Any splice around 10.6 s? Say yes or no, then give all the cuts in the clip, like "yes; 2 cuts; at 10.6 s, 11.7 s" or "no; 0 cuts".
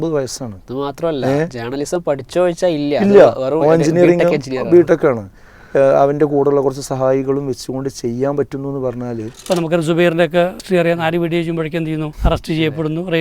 yes; 3 cuts; at 9.3 s, 10.6 s, 12.1 s